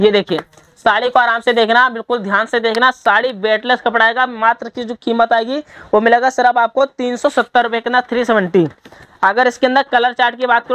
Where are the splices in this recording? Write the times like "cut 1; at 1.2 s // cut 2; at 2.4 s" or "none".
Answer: none